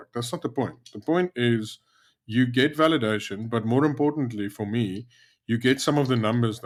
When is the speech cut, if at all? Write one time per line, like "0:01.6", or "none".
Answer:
none